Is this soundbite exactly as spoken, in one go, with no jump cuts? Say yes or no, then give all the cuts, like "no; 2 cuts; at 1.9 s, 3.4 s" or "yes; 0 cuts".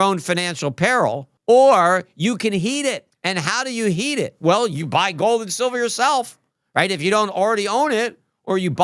no; 2 cuts; at 1.3 s, 3.1 s